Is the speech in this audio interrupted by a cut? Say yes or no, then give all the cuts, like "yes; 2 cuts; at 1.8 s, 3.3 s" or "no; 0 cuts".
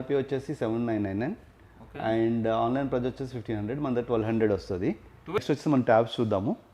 yes; 1 cut; at 5.4 s